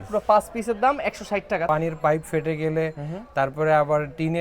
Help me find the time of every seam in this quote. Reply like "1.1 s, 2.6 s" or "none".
1.7 s